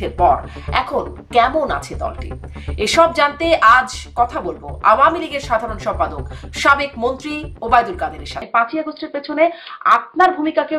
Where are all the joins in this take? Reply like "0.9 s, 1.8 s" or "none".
8.4 s